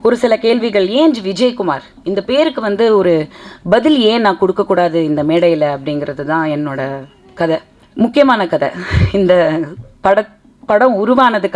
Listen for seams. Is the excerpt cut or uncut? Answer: cut